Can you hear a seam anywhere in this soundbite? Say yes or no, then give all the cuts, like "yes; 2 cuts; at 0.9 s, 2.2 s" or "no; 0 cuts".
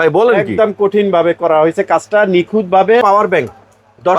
yes; 1 cut; at 3.0 s